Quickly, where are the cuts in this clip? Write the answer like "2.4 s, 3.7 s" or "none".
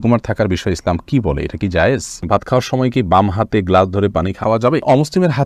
2.2 s, 4.6 s